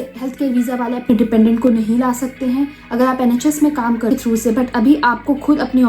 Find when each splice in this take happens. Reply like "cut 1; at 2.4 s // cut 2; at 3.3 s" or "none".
cut 1; at 4.1 s